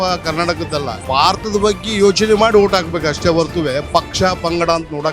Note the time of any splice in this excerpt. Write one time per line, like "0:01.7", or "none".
0:01.0